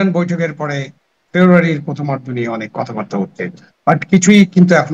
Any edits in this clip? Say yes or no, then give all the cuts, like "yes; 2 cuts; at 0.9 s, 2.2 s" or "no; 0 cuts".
no; 0 cuts